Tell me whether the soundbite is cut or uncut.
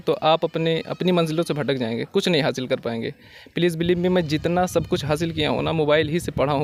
uncut